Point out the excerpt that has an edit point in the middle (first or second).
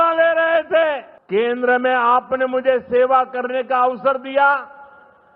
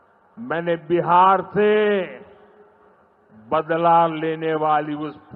first